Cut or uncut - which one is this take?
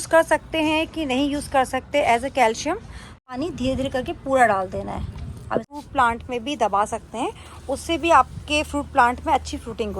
cut